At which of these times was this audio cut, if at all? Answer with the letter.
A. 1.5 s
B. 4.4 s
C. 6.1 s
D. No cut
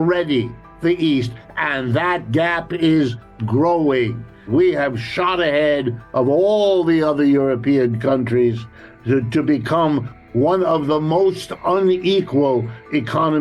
B